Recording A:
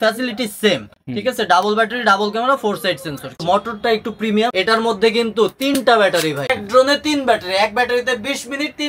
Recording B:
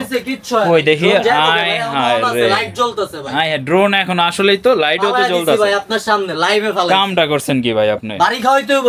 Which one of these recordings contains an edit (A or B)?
A